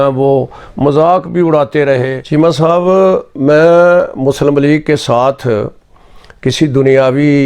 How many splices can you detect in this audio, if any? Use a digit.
1